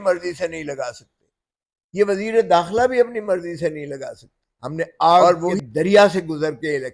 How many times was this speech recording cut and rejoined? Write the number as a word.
one